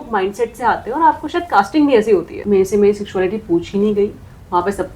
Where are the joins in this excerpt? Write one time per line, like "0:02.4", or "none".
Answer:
0:02.3